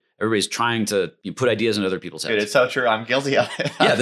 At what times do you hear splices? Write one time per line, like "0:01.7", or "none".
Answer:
0:01.2